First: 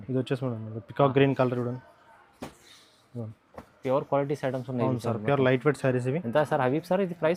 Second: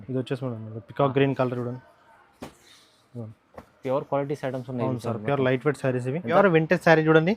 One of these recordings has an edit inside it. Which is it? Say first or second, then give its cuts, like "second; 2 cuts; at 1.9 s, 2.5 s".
second; 1 cut; at 6.4 s